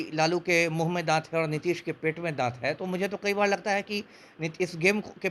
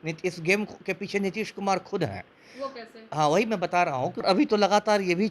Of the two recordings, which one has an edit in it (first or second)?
second